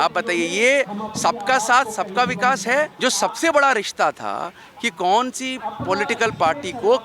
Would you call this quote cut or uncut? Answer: cut